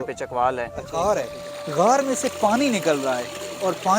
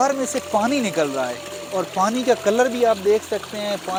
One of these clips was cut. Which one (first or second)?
first